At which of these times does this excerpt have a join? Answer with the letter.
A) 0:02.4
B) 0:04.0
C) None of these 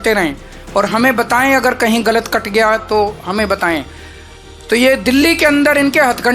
C